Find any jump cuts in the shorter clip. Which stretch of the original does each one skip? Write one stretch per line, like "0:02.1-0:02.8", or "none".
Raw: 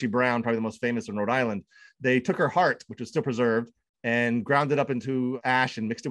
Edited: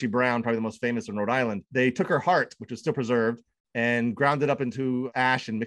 0:01.6-0:01.9